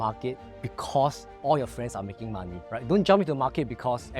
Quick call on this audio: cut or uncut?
cut